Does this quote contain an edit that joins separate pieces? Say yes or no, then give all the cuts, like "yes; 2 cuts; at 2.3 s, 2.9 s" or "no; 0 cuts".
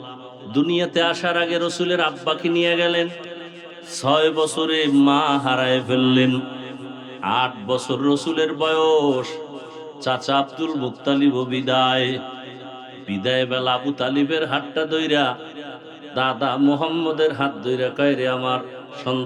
no; 0 cuts